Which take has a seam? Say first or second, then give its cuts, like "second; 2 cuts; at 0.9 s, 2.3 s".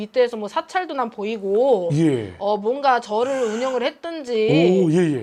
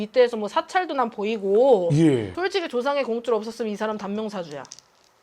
second; 1 cut; at 2.3 s